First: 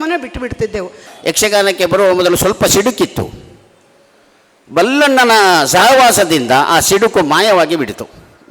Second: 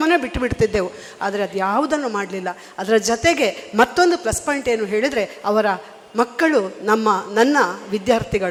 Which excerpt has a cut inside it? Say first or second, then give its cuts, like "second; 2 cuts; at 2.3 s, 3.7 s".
first; 1 cut; at 1.1 s